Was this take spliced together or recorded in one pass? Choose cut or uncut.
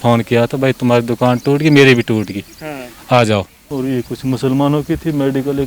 cut